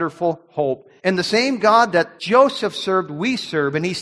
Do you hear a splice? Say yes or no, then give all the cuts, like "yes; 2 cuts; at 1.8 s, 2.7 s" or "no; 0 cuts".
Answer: yes; 2 cuts; at 0.9 s, 2.2 s